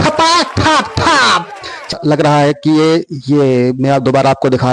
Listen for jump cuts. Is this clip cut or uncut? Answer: cut